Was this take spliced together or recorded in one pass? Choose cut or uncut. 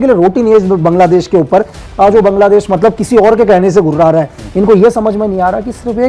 cut